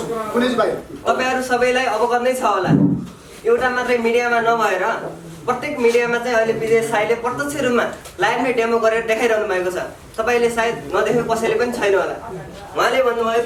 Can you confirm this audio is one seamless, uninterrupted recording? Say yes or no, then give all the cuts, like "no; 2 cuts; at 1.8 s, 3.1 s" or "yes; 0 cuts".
yes; 0 cuts